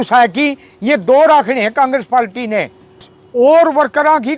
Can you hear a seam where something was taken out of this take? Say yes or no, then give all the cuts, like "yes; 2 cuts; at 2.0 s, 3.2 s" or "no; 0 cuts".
yes; 1 cut; at 3.2 s